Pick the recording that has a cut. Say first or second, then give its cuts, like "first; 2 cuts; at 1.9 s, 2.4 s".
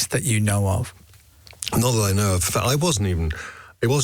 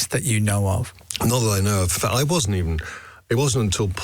second; 1 cut; at 1.0 s